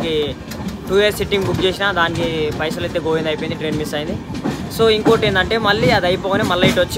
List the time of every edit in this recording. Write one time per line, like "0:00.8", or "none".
none

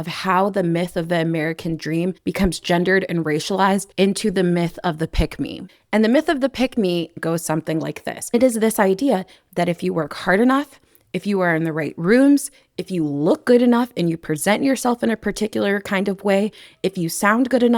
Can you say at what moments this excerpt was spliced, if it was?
0:07.2

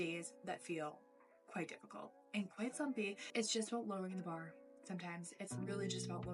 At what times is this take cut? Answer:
none

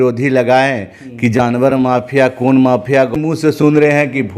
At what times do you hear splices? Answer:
0:03.1

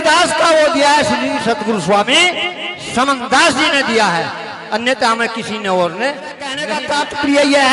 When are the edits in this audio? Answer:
0:06.6

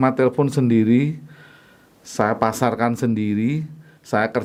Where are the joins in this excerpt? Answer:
none

